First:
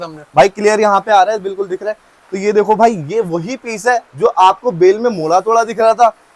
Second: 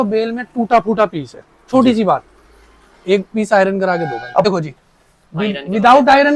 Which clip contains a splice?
second; 1 cut; at 4.5 s

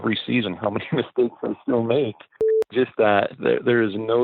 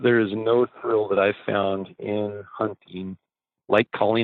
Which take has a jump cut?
first; 1 cut; at 2.6 s

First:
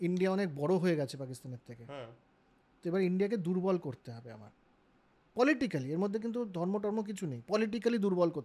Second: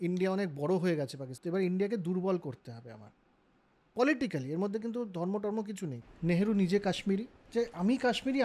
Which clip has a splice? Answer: second; 3 cuts; at 1.3 s, 5.9 s, 7.4 s

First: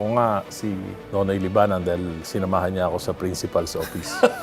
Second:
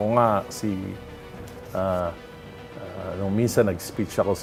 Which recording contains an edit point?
first; 1 cut; at 0.9 s

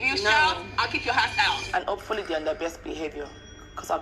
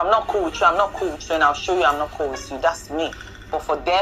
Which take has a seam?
first; 1 cut; at 1.6 s

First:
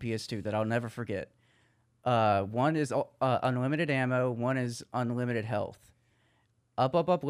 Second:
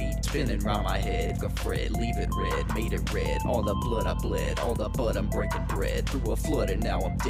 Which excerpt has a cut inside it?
second; 1 cut; at 1.4 s

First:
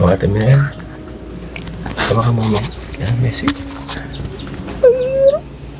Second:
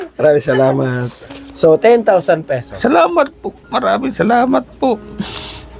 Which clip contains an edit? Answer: second; 1 cut; at 2.7 s

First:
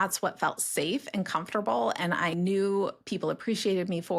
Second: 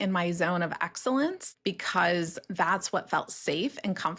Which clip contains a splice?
second; 1 cut; at 1.5 s

